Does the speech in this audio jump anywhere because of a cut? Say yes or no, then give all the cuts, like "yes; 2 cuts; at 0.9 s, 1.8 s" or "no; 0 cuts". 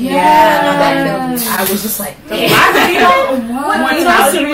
no; 0 cuts